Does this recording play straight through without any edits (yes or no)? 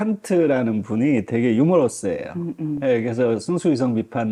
yes